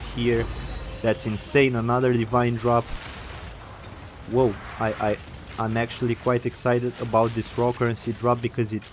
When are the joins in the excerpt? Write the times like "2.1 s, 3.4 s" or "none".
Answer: none